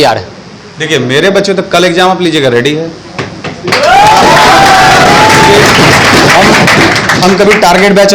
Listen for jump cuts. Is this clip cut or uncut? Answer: uncut